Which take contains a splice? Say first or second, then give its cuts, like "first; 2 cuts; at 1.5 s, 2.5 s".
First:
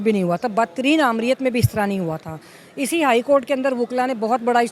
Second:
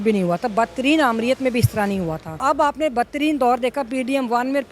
second; 1 cut; at 2.4 s